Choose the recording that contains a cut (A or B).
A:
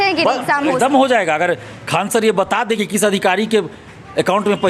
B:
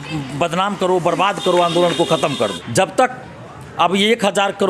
B